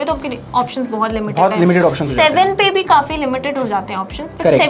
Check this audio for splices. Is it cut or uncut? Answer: uncut